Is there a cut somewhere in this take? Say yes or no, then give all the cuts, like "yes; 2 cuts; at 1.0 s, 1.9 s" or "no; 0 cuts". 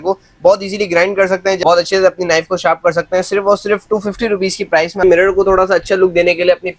yes; 2 cuts; at 1.6 s, 5.0 s